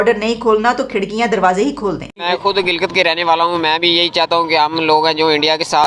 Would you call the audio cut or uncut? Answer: cut